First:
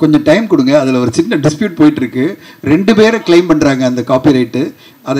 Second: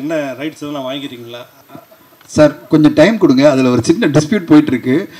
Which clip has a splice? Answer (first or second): second